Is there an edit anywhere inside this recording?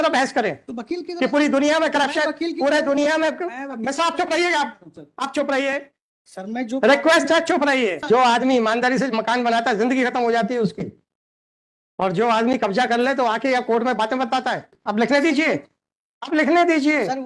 yes; 2 cuts; at 8.0 s, 14.8 s

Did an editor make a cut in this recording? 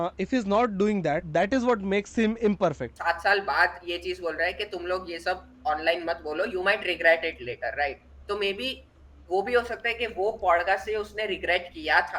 yes; 2 cuts; at 1.2 s, 2.9 s

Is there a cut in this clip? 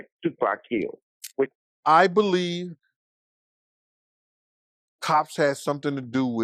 yes; 1 cut; at 1.6 s

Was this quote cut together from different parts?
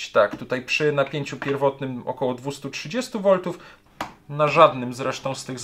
yes; 1 cut; at 3.7 s

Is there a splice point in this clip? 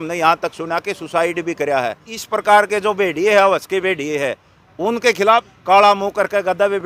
yes; 2 cuts; at 2.1 s, 5.5 s

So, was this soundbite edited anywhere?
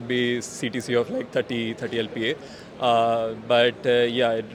no; 0 cuts

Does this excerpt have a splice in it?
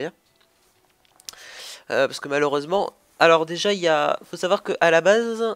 no; 0 cuts

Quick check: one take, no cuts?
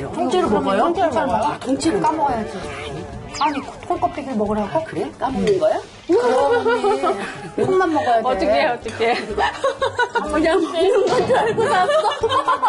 yes; 0 cuts

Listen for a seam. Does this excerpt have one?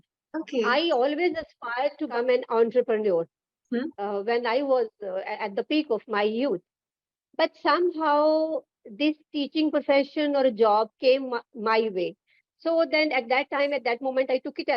yes; 1 cut; at 2.1 s

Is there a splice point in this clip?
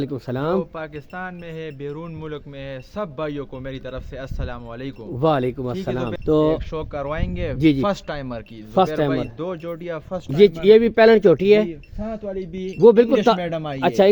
yes; 1 cut; at 6.1 s

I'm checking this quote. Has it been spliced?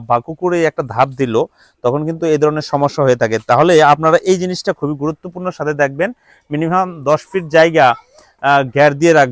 no; 0 cuts

